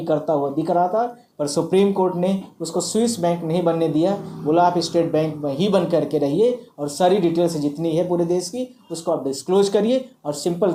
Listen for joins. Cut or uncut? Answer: uncut